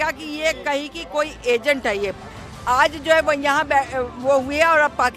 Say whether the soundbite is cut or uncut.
cut